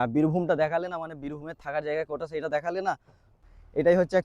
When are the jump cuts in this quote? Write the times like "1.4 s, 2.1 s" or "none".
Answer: 3.3 s